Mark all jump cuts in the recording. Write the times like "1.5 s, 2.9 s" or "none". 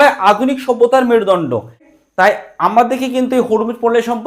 1.9 s